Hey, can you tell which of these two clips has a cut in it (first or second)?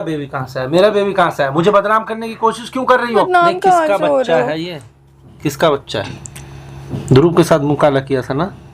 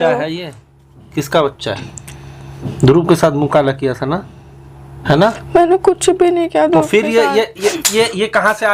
first